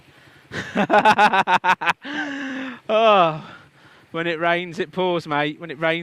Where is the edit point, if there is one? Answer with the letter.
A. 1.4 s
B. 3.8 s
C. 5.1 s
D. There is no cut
D